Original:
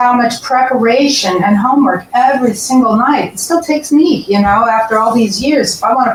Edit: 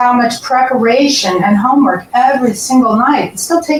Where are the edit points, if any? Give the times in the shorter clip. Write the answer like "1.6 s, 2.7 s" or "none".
none